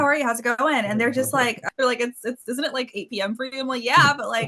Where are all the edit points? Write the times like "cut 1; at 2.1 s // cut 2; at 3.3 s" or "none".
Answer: cut 1; at 1.6 s